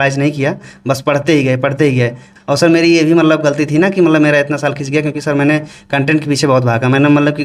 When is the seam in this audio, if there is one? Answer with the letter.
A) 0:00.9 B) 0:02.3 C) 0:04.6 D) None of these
B